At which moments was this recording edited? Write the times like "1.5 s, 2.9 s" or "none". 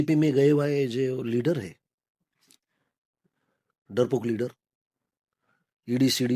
none